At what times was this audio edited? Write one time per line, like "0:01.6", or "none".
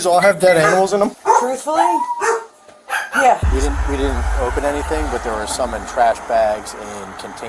0:01.2
0:03.4